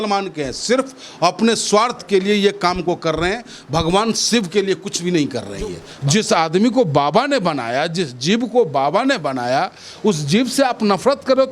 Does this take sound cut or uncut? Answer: cut